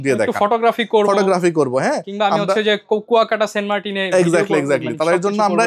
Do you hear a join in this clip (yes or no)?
no